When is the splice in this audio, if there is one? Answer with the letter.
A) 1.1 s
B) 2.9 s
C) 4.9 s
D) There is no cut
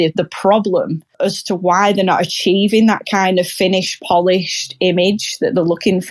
A